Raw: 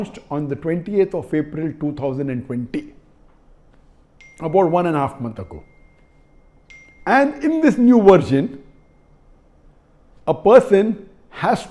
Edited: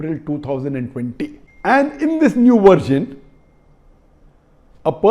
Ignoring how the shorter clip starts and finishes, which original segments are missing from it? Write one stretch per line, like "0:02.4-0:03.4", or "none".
0:03.0-0:06.9